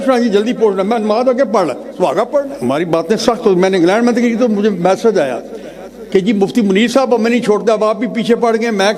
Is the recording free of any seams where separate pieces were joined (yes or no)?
no